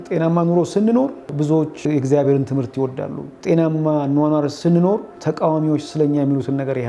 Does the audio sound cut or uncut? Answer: cut